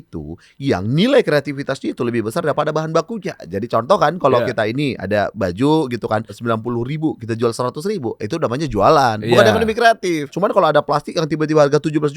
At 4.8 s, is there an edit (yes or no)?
no